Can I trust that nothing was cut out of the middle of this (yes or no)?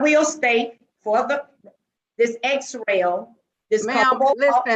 yes